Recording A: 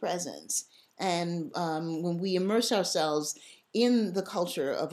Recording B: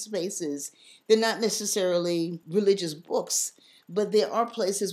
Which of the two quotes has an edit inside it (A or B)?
B